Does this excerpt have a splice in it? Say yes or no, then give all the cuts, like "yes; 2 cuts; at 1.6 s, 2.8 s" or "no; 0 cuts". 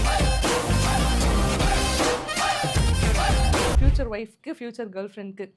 yes; 1 cut; at 3.8 s